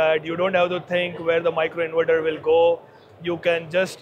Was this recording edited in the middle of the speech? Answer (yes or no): no